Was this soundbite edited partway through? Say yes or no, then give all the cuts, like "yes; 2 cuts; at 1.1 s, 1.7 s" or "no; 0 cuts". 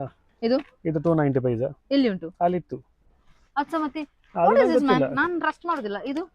no; 0 cuts